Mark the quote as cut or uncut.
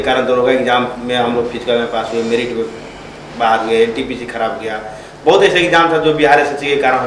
uncut